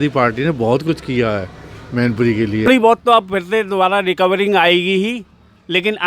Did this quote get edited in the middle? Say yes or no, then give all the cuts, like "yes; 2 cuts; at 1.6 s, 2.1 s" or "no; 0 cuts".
yes; 1 cut; at 2.7 s